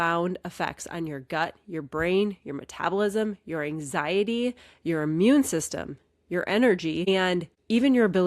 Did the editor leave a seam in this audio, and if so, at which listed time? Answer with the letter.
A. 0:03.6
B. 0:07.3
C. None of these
B